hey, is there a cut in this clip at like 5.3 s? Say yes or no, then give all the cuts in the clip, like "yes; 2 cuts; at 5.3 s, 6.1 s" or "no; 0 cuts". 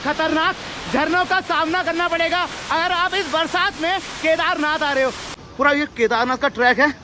yes; 1 cut; at 5.3 s